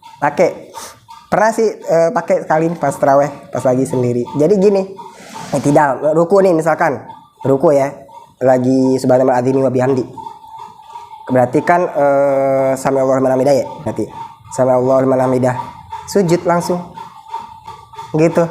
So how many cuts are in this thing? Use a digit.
2